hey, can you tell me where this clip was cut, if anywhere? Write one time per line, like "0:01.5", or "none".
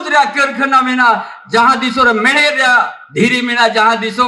0:03.0